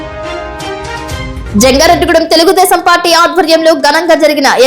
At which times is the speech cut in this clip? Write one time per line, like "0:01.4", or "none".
0:01.1

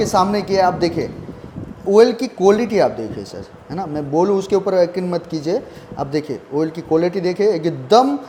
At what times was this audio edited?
none

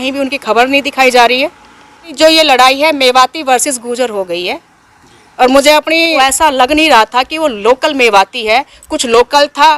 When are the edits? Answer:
0:02.1
0:06.2

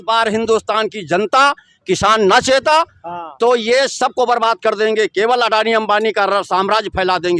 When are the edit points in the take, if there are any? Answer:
none

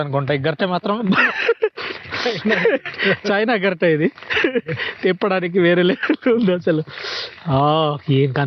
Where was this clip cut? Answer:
none

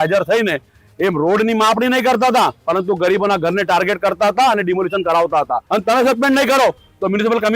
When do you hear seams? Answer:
0:05.6

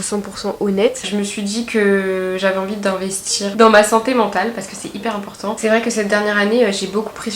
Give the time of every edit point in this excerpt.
0:01.0
0:03.5
0:05.6

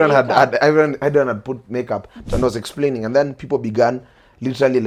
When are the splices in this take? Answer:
0:02.2

